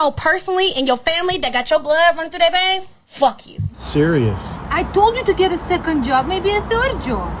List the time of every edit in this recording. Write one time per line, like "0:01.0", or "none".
0:03.8